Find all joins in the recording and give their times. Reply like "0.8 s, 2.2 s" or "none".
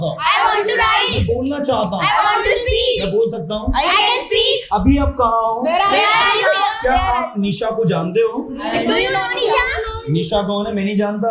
none